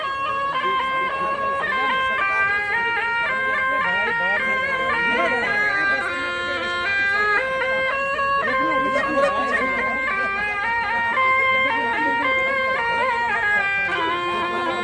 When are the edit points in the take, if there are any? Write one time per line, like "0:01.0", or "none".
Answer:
none